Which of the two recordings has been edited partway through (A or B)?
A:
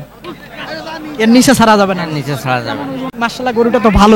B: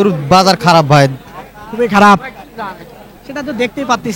A